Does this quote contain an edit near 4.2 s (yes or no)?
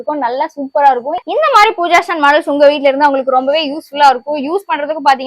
no